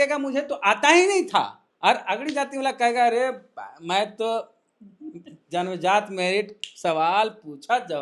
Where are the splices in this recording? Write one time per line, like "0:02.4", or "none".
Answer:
0:01.6